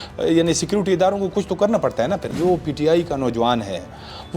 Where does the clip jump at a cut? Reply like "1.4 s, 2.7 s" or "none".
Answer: 2.3 s

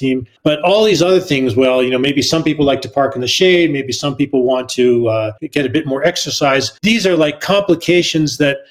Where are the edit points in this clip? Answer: none

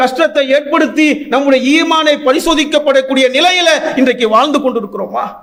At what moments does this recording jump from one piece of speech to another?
none

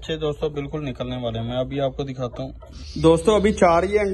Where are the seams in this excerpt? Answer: 2.6 s

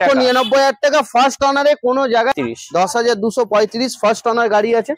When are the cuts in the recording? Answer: 2.3 s

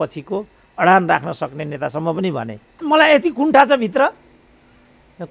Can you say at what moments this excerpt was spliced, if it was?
2.6 s

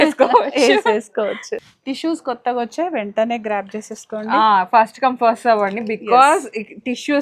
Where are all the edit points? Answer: 1.5 s

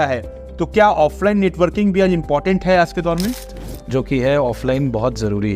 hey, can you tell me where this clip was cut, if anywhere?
3.5 s

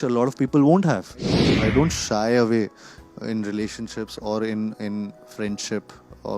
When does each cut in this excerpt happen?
1.5 s

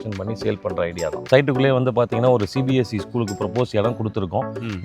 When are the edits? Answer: 1.3 s

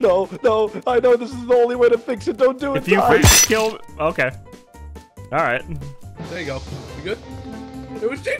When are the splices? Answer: none

